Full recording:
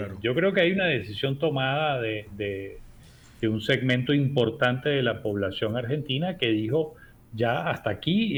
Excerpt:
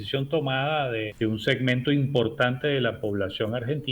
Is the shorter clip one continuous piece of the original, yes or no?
no